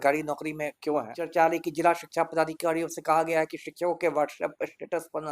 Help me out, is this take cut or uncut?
cut